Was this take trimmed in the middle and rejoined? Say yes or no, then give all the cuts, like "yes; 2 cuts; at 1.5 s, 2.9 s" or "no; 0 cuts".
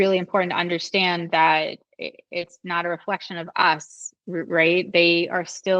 no; 0 cuts